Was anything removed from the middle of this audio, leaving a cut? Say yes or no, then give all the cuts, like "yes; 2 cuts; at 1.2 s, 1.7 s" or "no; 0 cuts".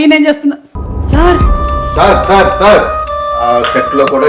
yes; 1 cut; at 3.4 s